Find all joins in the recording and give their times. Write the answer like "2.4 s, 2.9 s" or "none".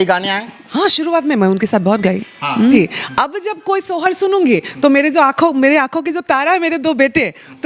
2.8 s

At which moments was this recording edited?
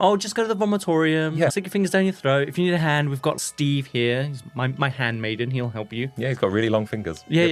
none

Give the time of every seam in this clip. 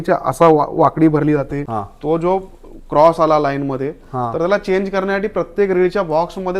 1.6 s

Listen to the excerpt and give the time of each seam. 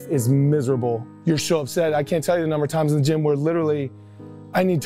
1.1 s

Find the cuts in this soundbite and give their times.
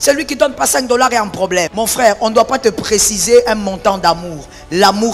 1.7 s

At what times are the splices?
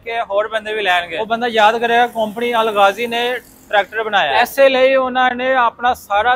1.1 s, 4.3 s

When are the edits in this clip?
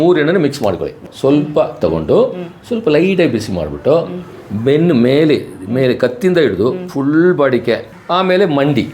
1.1 s, 7.9 s

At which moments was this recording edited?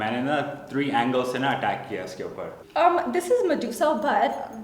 2.6 s

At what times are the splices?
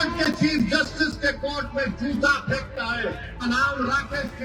3.5 s

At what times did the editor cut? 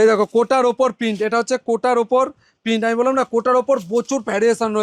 none

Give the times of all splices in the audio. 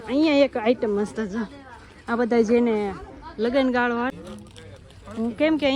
4.1 s

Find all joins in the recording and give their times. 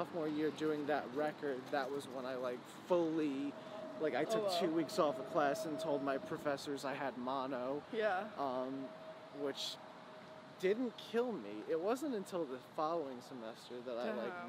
none

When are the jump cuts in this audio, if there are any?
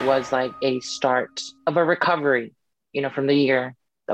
1.4 s

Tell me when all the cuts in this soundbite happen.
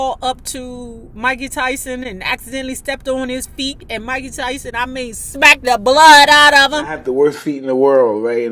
3.8 s, 5.2 s

